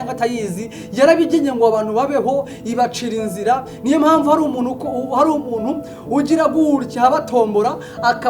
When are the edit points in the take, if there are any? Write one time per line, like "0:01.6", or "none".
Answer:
none